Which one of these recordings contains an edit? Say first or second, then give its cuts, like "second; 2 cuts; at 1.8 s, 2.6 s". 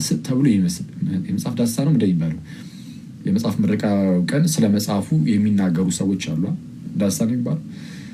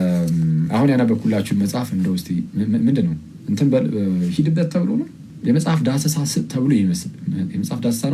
second; 1 cut; at 5.2 s